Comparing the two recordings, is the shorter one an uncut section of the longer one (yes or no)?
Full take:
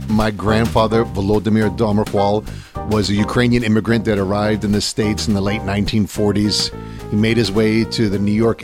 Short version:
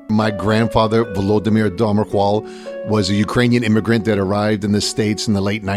yes